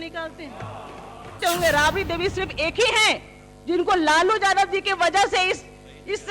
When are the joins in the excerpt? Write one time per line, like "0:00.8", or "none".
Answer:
0:01.4